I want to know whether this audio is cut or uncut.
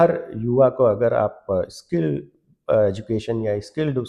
uncut